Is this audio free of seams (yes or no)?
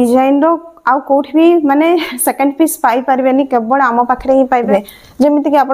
no